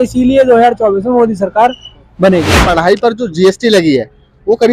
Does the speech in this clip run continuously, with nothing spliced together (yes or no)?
no